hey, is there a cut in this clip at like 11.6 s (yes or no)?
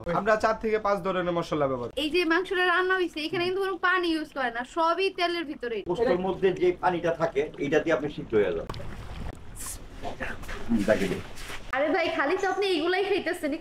yes